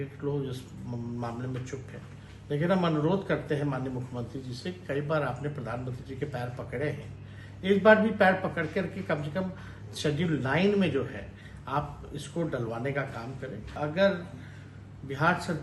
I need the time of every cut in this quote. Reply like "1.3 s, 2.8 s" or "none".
13.7 s